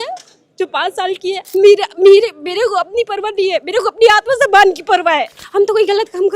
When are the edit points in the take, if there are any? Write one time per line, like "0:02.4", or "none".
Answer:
0:01.4
0:05.4